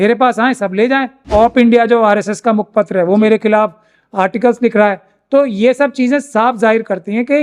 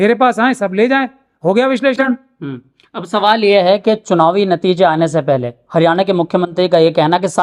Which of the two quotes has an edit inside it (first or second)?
first